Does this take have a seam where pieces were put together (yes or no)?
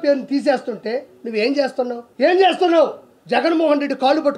yes